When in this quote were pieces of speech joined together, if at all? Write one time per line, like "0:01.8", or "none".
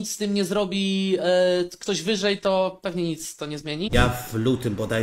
0:03.9